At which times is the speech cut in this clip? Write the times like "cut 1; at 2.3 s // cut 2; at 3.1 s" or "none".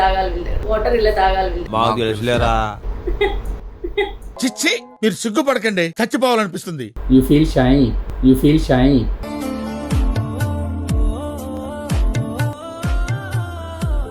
cut 1; at 9.2 s